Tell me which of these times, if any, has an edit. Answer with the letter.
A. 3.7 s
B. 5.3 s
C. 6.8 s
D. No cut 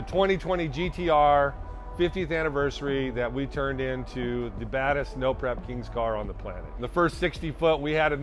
C